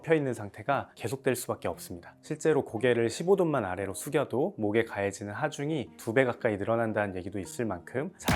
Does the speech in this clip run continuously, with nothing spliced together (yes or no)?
yes